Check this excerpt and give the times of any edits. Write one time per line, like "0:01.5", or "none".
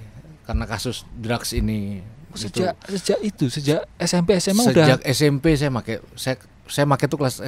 none